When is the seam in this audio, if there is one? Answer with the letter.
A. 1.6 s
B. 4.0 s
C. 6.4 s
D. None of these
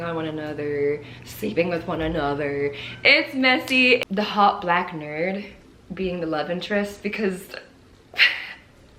B